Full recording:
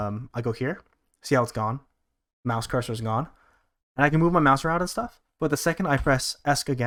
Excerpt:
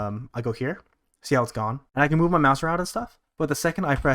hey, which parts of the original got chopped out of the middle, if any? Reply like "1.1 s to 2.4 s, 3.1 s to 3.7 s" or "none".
1.8 s to 3.8 s